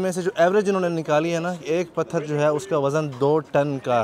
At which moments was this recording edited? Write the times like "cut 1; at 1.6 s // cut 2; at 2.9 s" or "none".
none